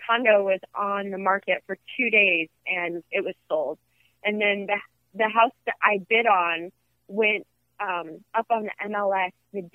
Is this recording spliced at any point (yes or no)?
no